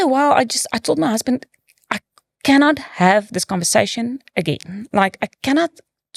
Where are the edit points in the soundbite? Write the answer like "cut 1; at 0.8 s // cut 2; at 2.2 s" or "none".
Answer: none